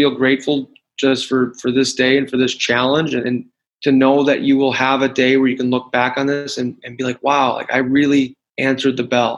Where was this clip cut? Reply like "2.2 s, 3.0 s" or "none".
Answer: 8.4 s